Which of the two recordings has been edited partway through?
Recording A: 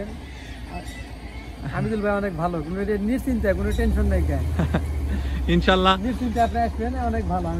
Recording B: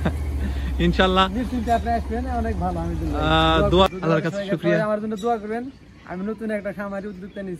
B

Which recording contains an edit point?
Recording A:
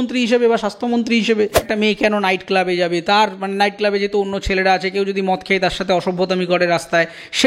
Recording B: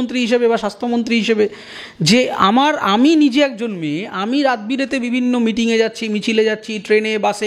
A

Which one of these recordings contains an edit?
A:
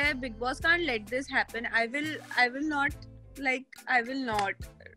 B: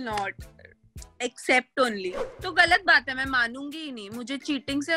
B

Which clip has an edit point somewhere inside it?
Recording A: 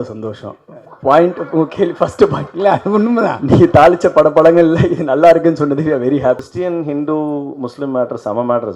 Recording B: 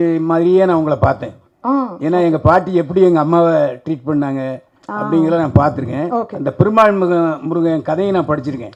A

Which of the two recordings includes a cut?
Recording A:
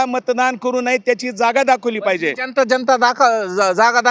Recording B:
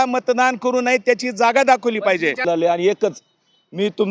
B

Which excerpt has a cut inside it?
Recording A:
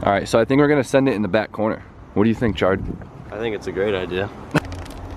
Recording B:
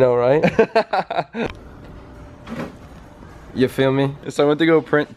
A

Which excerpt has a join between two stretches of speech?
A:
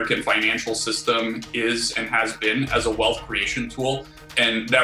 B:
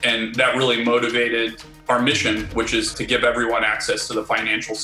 B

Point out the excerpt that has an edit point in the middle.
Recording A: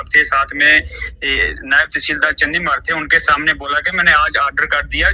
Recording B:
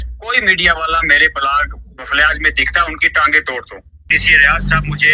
B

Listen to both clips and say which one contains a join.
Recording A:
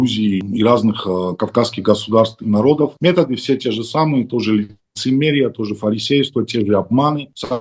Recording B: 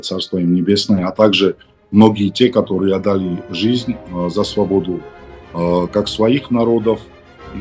A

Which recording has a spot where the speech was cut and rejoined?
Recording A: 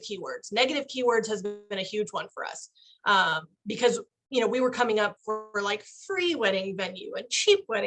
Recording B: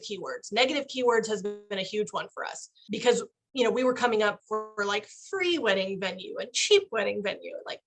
B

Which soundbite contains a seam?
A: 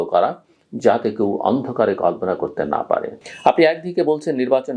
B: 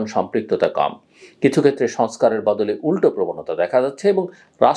A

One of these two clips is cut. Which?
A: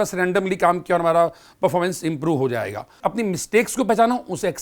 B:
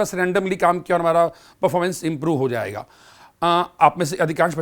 A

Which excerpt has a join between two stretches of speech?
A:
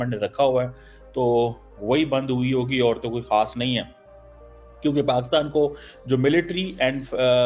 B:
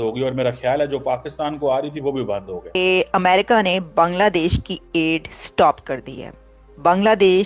B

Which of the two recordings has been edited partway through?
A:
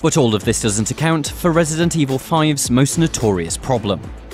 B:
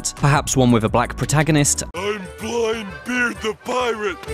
B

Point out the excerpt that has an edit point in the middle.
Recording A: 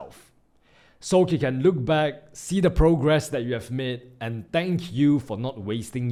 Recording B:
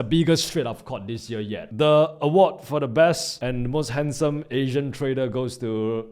B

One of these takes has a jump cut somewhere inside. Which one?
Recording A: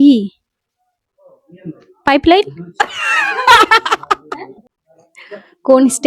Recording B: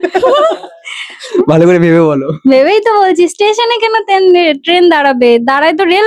A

